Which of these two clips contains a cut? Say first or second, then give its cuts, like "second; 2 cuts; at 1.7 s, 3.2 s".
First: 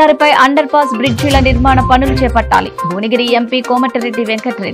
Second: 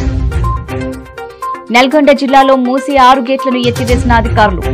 second; 1 cut; at 1.6 s